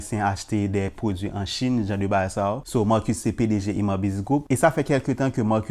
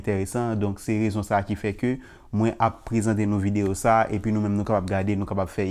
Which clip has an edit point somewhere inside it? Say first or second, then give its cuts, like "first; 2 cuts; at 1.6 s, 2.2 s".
first; 2 cuts; at 2.6 s, 4.4 s